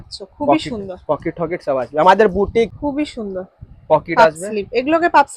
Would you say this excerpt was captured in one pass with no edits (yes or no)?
no